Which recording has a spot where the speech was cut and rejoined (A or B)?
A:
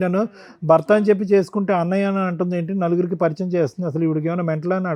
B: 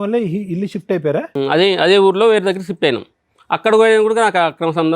B